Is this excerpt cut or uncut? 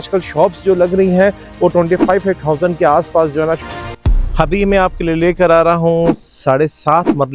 cut